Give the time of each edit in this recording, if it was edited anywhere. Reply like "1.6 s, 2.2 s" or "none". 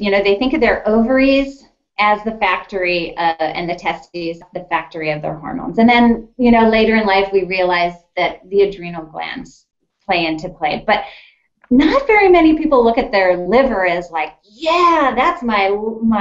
4.4 s